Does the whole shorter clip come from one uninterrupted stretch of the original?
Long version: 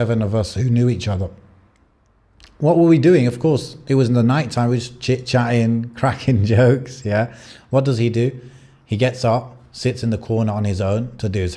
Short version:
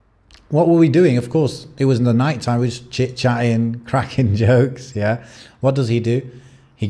yes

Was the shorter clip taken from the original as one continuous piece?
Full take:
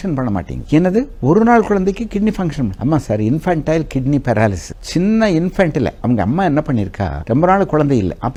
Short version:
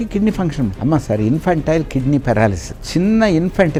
yes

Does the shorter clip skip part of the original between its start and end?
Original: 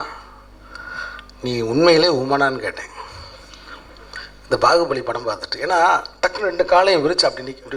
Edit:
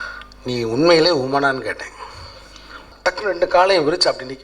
yes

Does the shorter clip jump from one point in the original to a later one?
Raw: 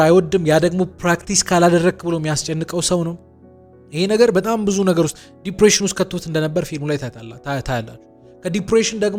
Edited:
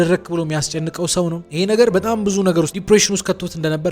yes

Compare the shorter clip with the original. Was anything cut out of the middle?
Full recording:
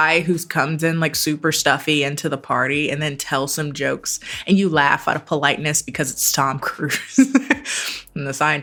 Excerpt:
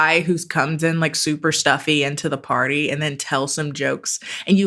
no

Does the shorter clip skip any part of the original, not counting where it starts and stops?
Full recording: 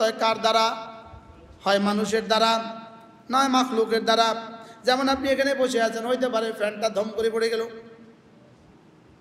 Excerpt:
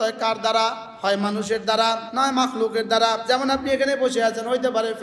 yes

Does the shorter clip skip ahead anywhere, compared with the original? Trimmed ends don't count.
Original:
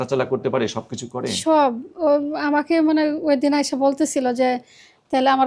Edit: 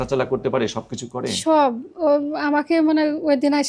no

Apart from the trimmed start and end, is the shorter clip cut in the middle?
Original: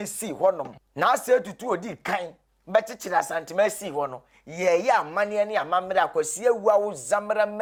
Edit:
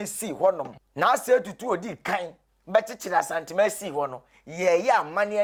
no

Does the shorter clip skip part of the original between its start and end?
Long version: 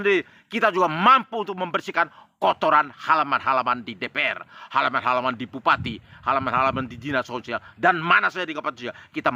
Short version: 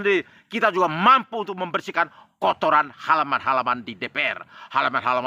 no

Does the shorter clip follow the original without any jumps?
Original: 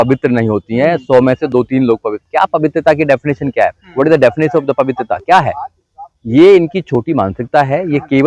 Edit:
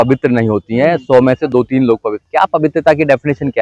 yes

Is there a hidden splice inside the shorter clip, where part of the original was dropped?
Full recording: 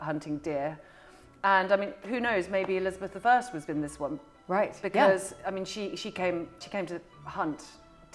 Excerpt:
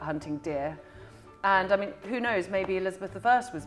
no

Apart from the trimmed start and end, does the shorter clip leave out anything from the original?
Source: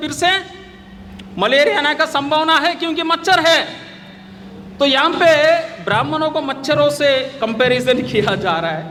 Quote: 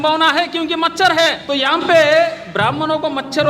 yes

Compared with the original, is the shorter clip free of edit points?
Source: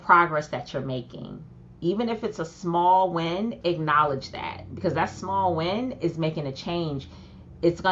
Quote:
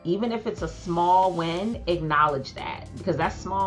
yes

